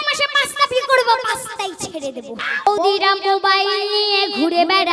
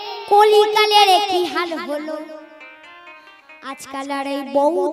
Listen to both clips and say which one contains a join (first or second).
first